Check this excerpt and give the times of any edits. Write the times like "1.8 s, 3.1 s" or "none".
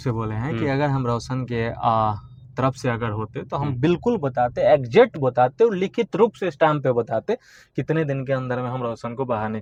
none